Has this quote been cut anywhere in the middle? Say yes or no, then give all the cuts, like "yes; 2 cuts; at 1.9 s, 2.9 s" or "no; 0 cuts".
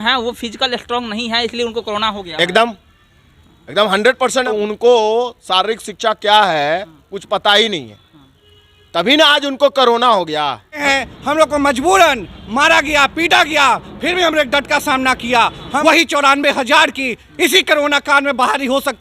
yes; 3 cuts; at 4.4 s, 10.8 s, 15.7 s